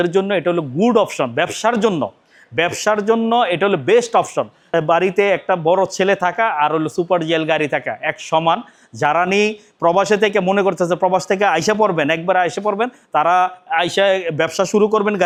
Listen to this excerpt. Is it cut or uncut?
uncut